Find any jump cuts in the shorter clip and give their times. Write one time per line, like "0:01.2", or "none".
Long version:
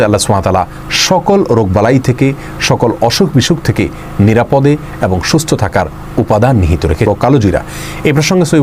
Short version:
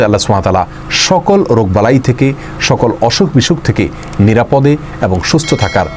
none

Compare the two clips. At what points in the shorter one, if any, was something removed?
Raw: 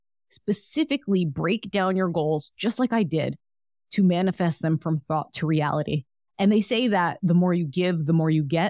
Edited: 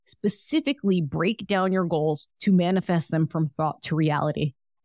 0:02.3

